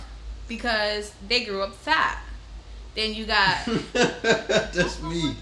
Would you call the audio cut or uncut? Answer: uncut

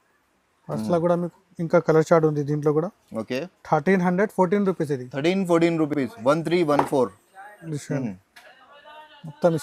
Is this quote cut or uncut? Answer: uncut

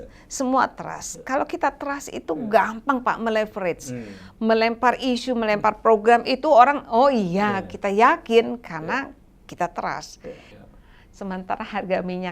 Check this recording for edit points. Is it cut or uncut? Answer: cut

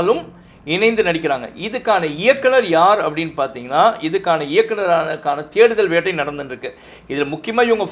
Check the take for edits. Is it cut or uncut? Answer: uncut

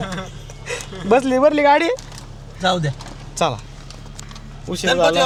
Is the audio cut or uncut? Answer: uncut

